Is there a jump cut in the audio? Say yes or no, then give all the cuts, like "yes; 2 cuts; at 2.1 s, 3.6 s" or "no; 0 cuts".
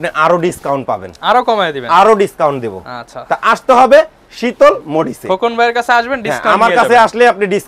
no; 0 cuts